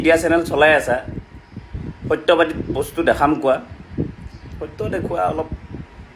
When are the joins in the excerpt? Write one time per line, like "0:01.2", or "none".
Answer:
none